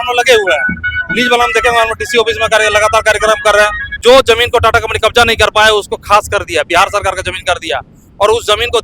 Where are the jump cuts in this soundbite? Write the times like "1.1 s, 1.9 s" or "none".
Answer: 3.8 s